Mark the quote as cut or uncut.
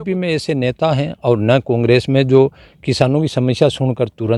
uncut